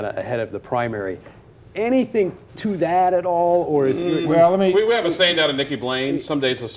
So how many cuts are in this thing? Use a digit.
1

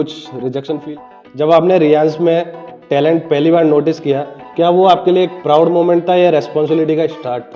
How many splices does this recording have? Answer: 1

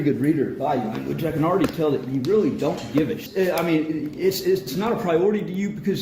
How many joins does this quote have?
1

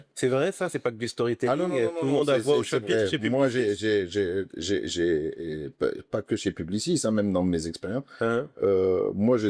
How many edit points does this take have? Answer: 0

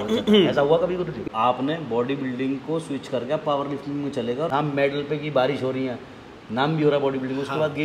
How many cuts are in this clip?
2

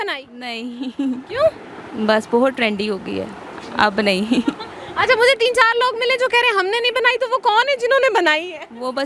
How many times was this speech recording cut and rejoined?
0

